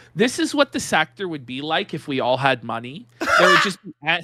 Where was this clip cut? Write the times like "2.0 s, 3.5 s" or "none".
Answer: none